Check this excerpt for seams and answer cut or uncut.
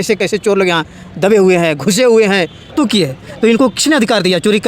cut